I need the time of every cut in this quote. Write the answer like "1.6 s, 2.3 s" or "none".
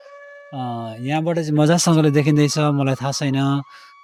none